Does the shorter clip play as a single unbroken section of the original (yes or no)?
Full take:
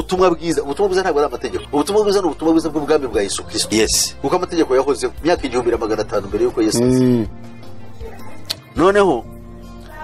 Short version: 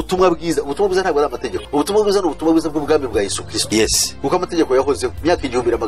yes